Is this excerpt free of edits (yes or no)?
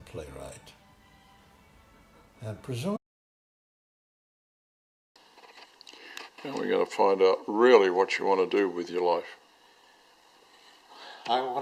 yes